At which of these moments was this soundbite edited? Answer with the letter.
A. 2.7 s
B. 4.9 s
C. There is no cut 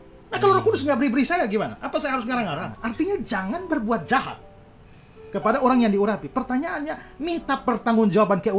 A